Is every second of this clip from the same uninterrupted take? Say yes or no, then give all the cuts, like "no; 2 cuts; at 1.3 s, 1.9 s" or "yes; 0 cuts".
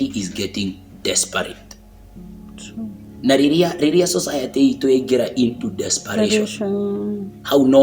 yes; 0 cuts